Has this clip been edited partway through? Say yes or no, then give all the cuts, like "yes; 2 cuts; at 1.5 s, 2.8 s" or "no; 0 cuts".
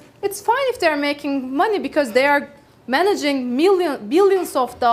no; 0 cuts